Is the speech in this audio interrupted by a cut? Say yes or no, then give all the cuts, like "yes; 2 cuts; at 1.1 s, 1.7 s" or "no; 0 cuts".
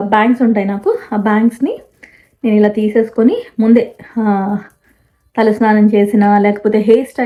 no; 0 cuts